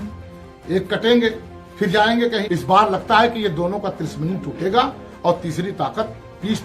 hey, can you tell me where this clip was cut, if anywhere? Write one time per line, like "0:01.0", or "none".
0:02.4